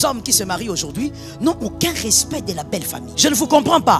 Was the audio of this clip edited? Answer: yes; 1 cut; at 3.1 s

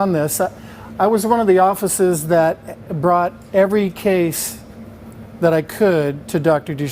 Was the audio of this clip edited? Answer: yes; 1 cut; at 1.5 s

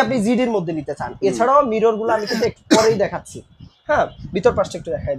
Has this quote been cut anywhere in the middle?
no; 0 cuts

